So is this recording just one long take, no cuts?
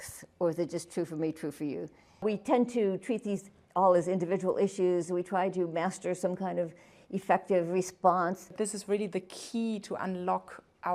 no; 2 cuts; at 2.2 s, 8.5 s

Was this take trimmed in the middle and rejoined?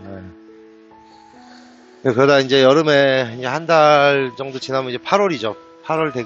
no; 0 cuts

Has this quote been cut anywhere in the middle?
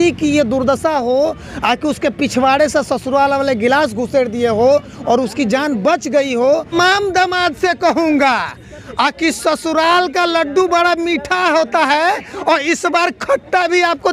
yes; 1 cut; at 6.7 s

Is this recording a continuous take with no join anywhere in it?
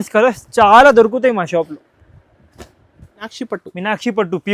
no; 1 cut; at 3.3 s

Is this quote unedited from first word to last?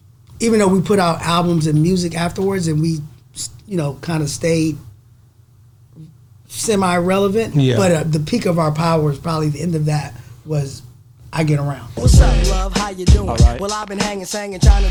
yes; 0 cuts

